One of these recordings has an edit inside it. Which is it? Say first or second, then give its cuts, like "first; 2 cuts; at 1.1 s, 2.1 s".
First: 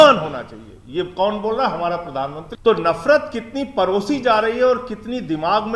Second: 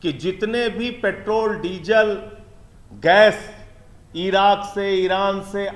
first; 1 cut; at 2.4 s